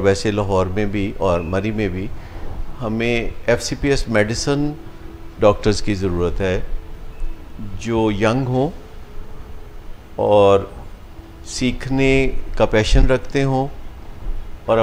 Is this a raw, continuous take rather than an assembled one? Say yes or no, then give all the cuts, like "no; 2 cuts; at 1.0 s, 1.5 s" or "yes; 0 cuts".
yes; 0 cuts